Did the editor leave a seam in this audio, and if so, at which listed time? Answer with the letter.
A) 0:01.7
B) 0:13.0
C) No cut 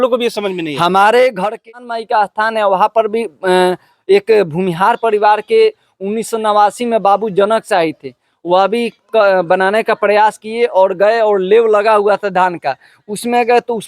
A